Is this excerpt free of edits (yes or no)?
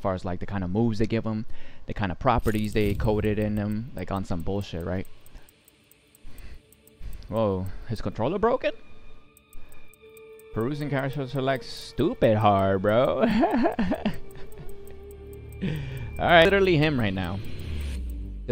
no